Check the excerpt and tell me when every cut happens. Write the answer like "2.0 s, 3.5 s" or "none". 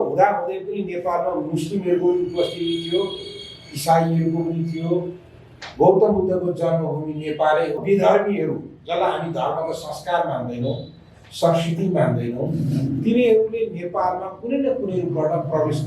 7.8 s